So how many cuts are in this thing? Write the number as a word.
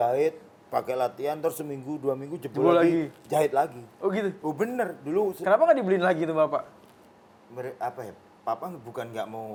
zero